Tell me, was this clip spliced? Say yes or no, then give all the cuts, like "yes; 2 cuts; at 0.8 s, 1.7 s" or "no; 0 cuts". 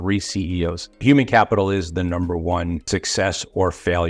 yes; 2 cuts; at 1.0 s, 3.1 s